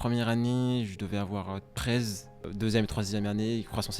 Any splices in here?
yes; 1 cut; at 2.5 s

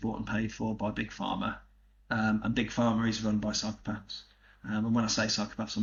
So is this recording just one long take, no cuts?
yes; 0 cuts

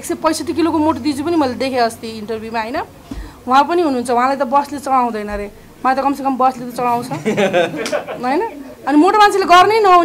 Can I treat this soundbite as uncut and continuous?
yes; 0 cuts

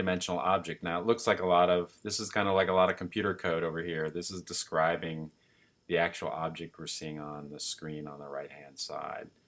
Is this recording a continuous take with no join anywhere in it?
yes; 0 cuts

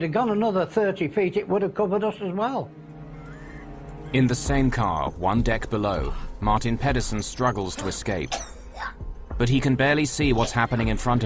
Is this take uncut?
no; 1 cut; at 3.9 s

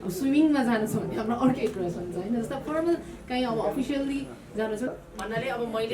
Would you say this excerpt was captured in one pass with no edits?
no; 1 cut; at 4.9 s

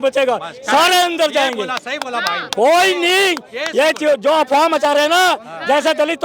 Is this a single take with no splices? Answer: yes; 0 cuts

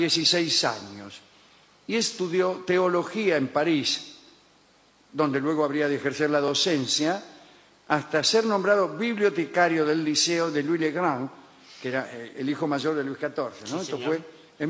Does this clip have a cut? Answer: yes; 1 cut; at 1.3 s

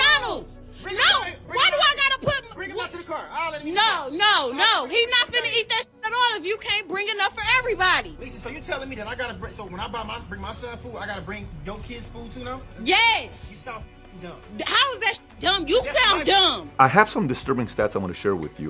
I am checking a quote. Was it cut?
yes; 1 cut; at 16.7 s

